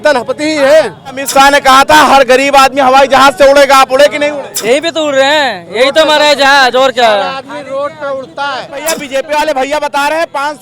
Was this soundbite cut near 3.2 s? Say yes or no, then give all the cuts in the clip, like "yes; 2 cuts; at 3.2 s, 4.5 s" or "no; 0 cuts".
no; 3 cuts; at 1.2 s, 4.5 s, 8.8 s